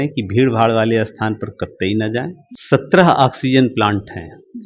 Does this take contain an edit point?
yes; 1 cut; at 2.5 s

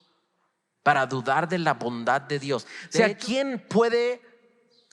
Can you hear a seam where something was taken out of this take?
yes; 1 cut; at 2.8 s

